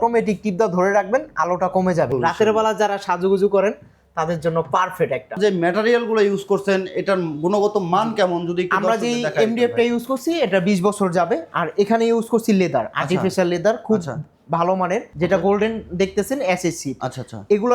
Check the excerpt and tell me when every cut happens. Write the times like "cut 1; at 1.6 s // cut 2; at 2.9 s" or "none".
cut 1; at 2.1 s // cut 2; at 5.3 s // cut 3; at 15.1 s